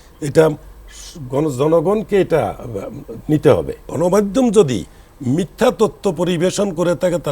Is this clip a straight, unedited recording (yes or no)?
no